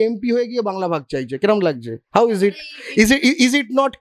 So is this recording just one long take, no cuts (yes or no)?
yes